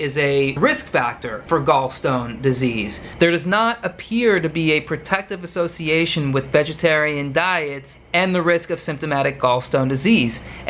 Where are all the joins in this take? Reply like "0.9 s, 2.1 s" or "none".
3.0 s